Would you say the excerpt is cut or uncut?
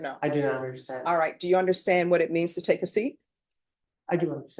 uncut